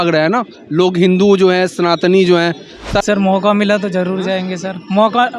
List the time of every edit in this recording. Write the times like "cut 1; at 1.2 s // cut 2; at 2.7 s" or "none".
cut 1; at 3.0 s